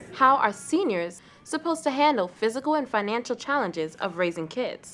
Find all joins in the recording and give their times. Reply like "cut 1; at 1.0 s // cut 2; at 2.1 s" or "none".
cut 1; at 1.2 s